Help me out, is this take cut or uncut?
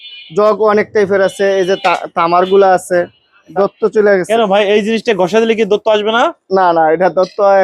cut